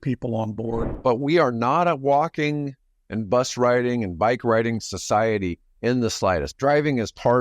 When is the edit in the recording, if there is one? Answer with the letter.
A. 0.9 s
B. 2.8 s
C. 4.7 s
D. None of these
A